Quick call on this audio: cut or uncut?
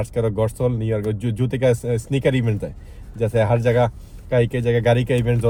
uncut